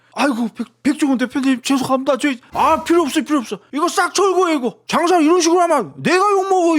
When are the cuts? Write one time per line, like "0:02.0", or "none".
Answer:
0:02.4
0:04.8